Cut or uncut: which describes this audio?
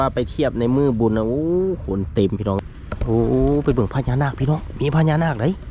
cut